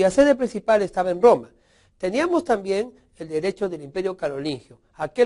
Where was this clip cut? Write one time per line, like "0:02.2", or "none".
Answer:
0:02.1